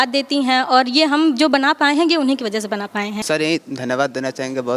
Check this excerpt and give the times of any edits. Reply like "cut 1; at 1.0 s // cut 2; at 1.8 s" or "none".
cut 1; at 3.2 s